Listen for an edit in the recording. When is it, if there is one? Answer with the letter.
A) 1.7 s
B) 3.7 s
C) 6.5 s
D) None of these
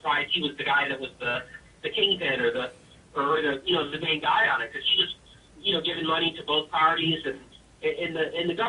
D